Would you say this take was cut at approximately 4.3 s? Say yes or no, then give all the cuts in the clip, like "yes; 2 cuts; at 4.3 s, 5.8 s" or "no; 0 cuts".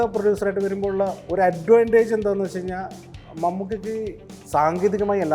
yes; 1 cut; at 4.3 s